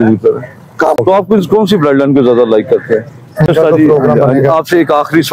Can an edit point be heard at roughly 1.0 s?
yes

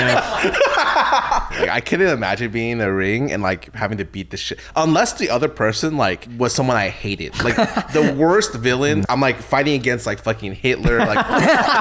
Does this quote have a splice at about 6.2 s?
yes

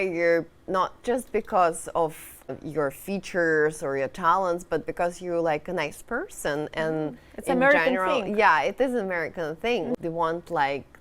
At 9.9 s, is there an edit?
yes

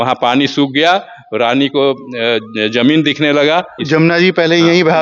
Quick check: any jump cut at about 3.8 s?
yes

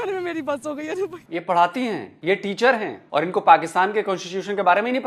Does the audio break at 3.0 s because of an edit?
yes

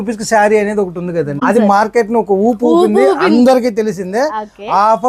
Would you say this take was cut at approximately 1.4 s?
yes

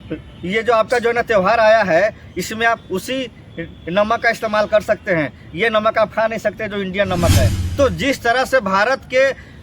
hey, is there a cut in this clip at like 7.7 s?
yes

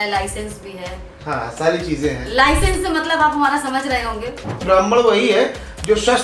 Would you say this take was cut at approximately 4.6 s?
yes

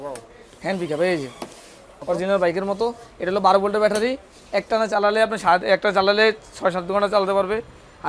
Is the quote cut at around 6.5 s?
no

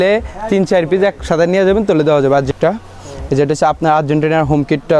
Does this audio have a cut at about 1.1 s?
no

